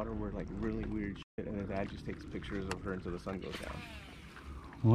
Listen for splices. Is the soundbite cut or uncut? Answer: uncut